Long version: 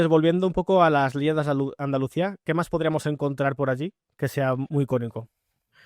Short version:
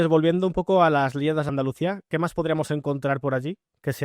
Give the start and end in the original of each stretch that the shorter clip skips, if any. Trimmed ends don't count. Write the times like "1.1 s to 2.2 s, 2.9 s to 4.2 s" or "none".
1.5 s to 1.8 s